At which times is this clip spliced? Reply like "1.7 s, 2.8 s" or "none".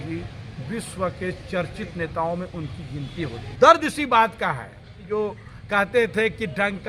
3.4 s, 5.0 s